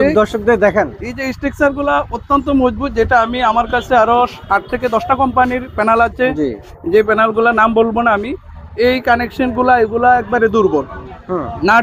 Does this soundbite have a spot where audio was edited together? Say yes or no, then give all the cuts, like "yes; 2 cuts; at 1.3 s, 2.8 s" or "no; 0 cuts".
no; 0 cuts